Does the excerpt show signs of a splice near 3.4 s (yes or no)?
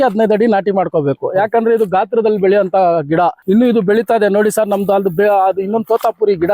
yes